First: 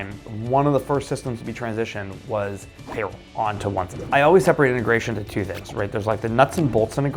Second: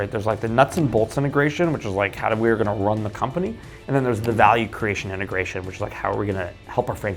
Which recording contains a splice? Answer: first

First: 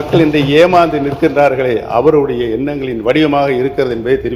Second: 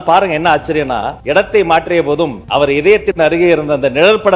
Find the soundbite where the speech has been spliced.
second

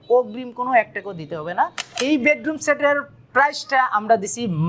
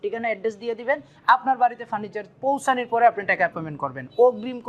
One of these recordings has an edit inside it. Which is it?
first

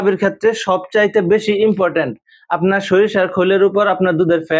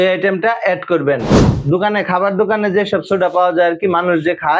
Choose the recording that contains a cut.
second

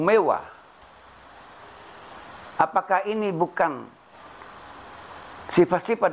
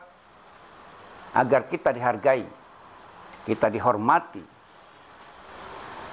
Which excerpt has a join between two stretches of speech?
first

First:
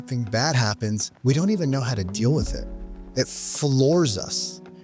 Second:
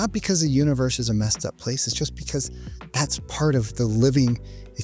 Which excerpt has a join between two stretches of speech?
first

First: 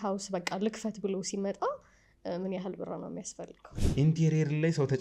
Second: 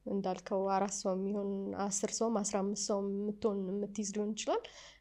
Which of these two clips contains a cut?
first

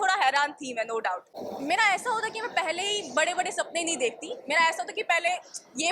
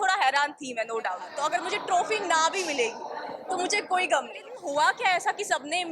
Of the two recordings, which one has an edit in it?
second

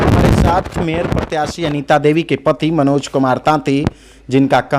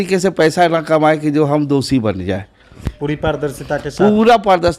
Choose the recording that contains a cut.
second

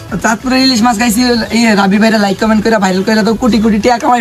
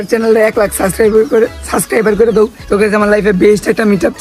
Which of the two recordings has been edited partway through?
second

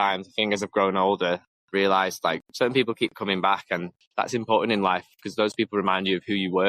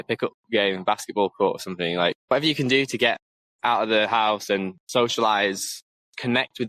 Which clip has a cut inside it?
first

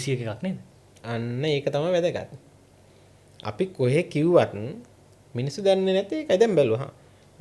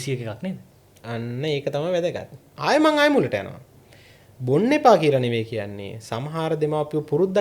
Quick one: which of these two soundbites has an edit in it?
second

